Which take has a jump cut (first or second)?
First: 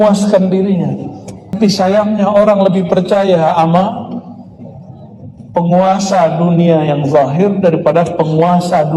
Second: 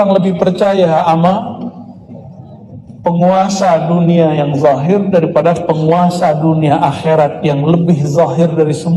first